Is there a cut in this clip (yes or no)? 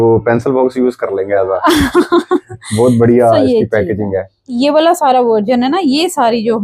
yes